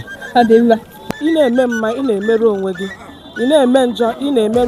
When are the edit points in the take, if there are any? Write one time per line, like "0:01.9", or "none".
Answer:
0:01.1